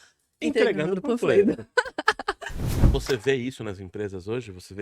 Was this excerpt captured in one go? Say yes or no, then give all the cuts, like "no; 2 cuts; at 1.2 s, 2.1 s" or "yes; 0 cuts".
no; 1 cut; at 2.7 s